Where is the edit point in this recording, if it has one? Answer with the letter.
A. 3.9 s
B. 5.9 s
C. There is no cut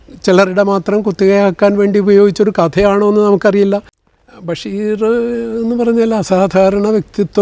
A